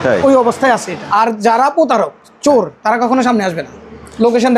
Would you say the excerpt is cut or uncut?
cut